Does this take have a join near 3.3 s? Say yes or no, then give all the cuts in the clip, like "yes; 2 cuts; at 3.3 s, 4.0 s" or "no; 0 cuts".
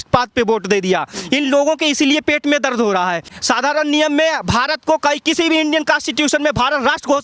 yes; 1 cut; at 3.3 s